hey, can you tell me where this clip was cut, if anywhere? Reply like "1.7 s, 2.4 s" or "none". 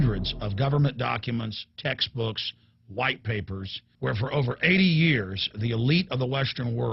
5.2 s